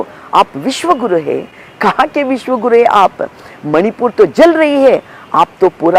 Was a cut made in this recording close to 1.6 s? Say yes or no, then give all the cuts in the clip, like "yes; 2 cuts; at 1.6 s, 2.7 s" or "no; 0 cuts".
no; 0 cuts